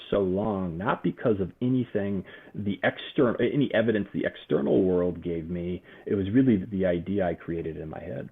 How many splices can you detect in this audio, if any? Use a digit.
1